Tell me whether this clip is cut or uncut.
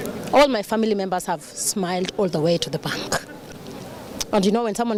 uncut